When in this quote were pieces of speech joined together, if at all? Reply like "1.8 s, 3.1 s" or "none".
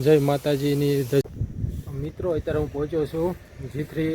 1.2 s